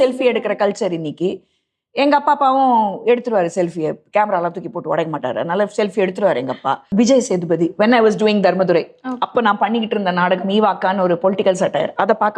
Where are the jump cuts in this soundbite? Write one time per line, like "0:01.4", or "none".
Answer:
0:06.9